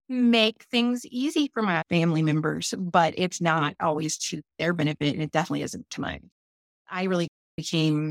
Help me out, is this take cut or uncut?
cut